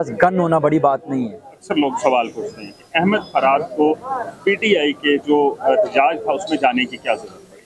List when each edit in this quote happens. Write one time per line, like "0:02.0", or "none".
0:01.5